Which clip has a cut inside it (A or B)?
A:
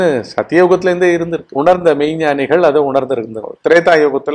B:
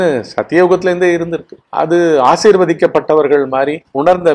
A